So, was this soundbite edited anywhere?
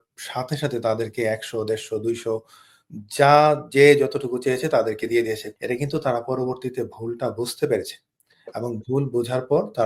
yes; 1 cut; at 5.5 s

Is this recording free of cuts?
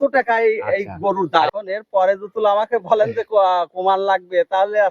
no; 1 cut; at 1.5 s

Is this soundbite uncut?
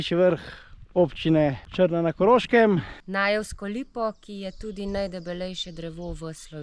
no; 2 cuts; at 1.6 s, 3.0 s

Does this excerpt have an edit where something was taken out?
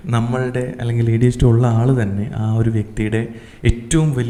no; 0 cuts

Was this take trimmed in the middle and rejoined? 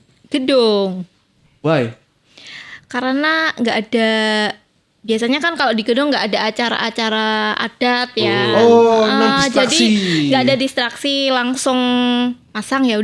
no; 0 cuts

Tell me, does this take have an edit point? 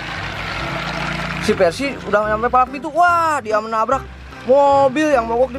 no; 0 cuts

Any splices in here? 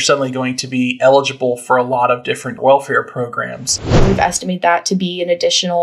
yes; 2 cuts; at 2.5 s, 4.0 s

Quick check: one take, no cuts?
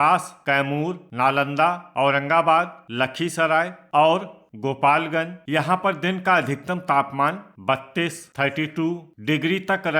no; 3 cuts; at 0.8 s, 3.8 s, 5.4 s

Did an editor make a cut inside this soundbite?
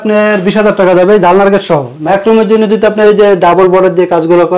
yes; 1 cut; at 1.9 s

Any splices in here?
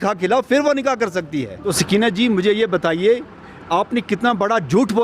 yes; 1 cut; at 1.7 s

